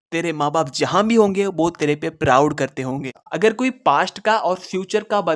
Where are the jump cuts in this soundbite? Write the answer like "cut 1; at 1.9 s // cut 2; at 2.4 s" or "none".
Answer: cut 1; at 3.0 s